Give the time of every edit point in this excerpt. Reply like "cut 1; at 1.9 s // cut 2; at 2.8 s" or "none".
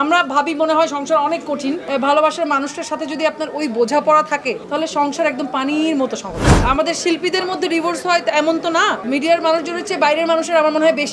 cut 1; at 1.8 s // cut 2; at 4.6 s // cut 3; at 6.5 s // cut 4; at 9.0 s

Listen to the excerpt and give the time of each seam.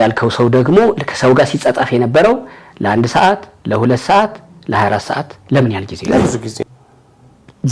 cut 1; at 6.5 s

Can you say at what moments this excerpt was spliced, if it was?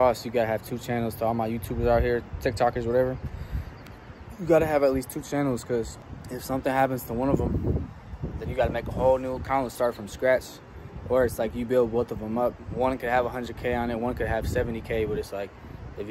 none

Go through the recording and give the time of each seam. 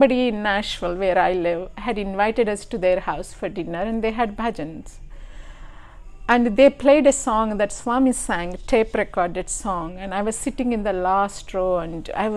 none

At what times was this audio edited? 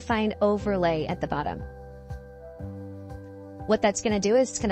cut 1; at 1.6 s // cut 2; at 3.7 s

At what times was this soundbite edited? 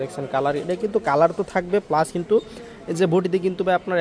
none

